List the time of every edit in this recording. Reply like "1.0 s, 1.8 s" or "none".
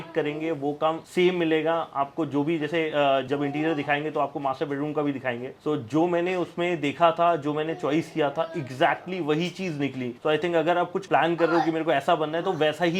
none